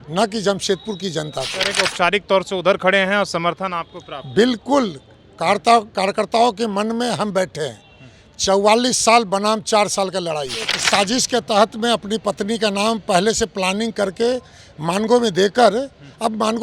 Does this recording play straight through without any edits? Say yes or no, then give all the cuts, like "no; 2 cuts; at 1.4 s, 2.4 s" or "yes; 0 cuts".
no; 2 cuts; at 1.6 s, 10.8 s